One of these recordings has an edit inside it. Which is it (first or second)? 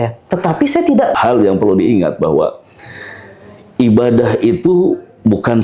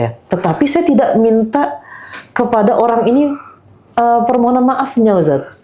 first